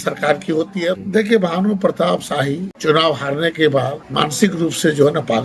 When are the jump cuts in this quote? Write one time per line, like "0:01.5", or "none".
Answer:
0:00.9
0:02.7
0:04.0